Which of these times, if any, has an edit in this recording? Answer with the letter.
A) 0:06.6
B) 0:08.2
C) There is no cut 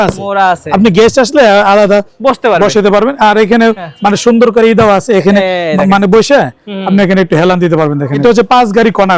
B